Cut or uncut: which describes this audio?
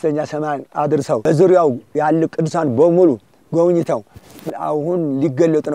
cut